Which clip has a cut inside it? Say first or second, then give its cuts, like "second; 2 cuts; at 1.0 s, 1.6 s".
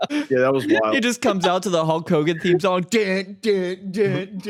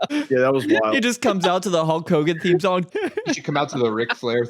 second; 1 cut; at 2.9 s